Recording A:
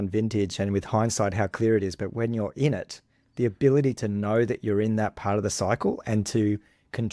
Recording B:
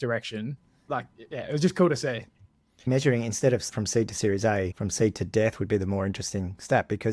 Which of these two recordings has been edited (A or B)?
B